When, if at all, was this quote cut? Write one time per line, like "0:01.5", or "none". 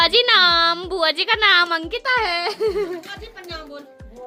none